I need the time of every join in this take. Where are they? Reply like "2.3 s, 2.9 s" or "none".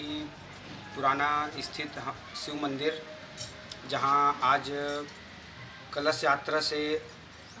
none